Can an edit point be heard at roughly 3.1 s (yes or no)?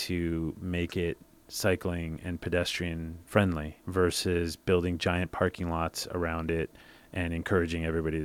yes